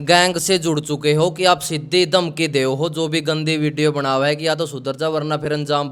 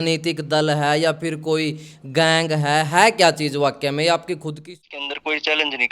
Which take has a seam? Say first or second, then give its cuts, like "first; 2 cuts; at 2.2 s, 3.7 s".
second; 1 cut; at 4.8 s